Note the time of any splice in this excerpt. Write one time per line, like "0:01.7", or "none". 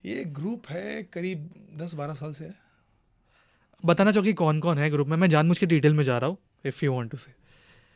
none